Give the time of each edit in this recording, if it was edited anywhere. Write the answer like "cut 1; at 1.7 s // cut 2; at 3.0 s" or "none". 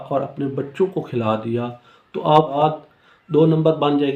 cut 1; at 2.6 s